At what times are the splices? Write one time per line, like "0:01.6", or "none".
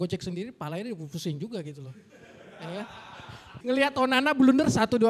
0:03.5